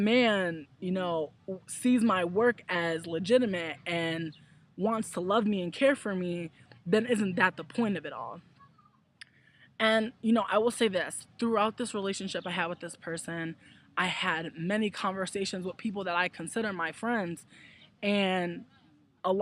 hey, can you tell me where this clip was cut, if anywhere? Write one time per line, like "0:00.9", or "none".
0:15.7